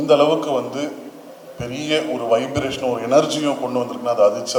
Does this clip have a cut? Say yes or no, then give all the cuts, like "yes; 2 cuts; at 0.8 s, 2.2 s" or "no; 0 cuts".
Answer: no; 0 cuts